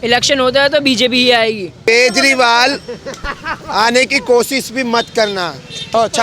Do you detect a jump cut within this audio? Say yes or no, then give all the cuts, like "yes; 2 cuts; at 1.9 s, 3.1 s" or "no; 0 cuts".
yes; 1 cut; at 1.7 s